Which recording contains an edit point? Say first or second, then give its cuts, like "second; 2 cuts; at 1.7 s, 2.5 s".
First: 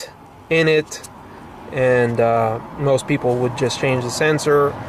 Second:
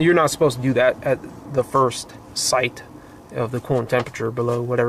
second; 1 cut; at 2.0 s